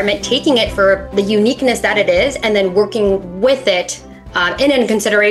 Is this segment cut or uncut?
cut